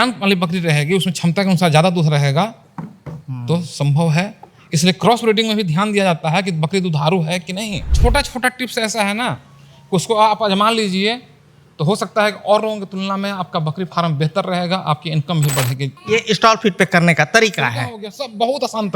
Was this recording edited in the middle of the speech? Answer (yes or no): yes